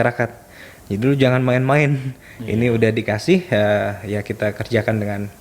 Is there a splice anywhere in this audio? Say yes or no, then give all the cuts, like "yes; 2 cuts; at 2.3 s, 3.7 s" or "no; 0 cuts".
no; 0 cuts